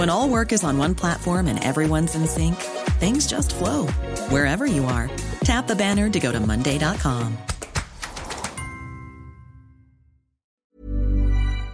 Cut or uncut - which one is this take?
cut